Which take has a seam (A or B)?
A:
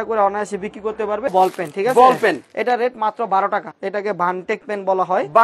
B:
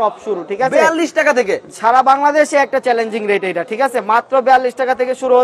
A